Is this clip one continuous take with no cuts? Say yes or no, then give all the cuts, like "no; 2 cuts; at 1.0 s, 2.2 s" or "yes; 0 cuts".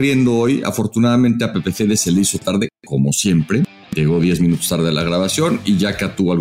yes; 0 cuts